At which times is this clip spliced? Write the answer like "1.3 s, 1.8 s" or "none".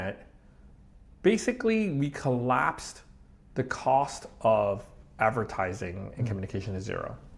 none